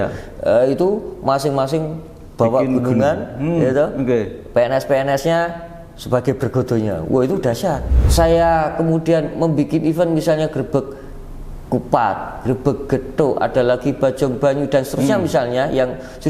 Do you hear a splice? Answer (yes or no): yes